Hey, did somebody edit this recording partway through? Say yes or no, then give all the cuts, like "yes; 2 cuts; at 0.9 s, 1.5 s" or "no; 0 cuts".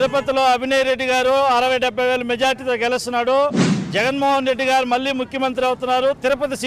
yes; 1 cut; at 3.9 s